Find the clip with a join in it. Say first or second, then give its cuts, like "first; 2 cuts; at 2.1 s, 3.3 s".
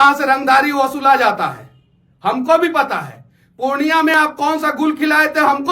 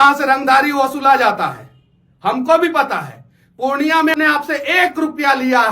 second; 1 cut; at 4.1 s